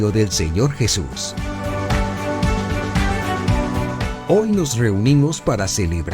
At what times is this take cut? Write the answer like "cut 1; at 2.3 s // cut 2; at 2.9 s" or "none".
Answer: cut 1; at 1.2 s // cut 2; at 4.2 s